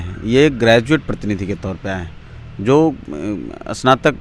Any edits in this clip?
no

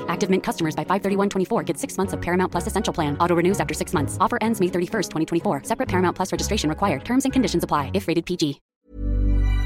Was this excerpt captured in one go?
no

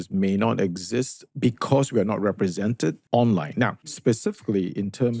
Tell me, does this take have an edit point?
yes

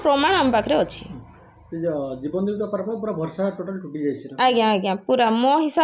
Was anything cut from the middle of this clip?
no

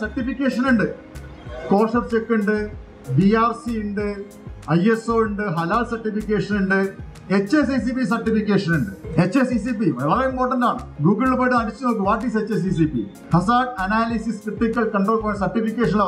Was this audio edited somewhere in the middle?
yes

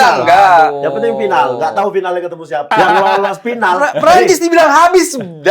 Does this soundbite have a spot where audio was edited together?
yes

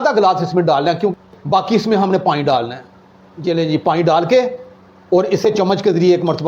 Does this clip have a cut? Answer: yes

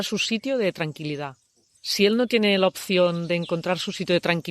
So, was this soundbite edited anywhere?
yes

